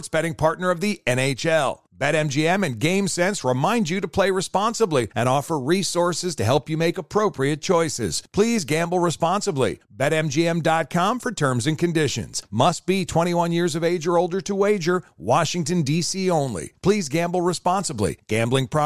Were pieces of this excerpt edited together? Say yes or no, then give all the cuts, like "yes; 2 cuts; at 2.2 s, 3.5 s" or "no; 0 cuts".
no; 0 cuts